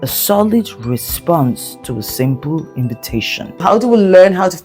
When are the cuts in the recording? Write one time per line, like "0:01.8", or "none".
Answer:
0:03.6